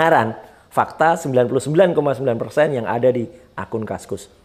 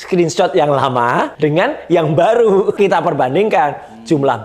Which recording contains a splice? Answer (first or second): second